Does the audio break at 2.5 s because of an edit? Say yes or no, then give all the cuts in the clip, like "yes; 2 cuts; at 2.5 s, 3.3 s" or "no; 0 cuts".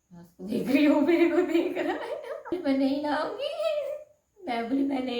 yes; 1 cut; at 2.5 s